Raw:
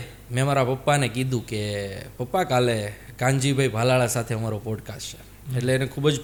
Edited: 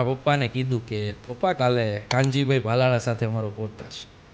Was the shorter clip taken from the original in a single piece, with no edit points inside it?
no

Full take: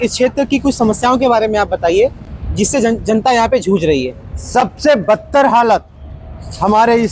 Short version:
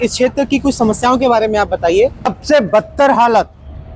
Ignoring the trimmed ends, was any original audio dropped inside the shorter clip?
yes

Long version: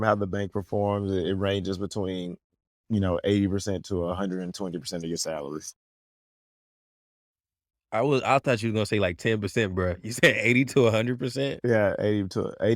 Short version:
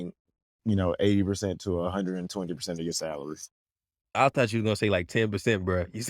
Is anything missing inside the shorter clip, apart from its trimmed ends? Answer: yes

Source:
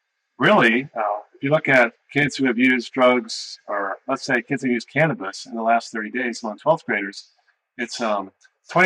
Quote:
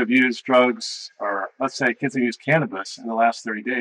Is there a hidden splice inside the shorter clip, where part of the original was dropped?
no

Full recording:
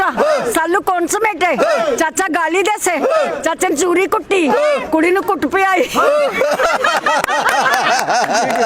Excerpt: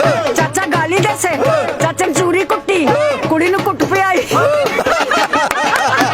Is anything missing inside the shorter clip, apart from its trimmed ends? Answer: yes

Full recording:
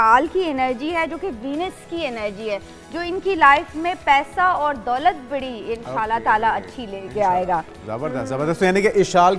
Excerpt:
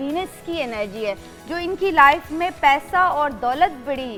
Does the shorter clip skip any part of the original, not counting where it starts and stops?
no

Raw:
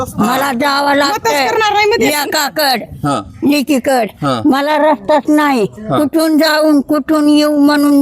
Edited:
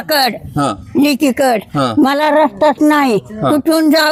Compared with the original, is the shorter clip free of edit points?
yes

